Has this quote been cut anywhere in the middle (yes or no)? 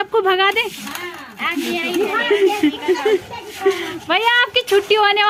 no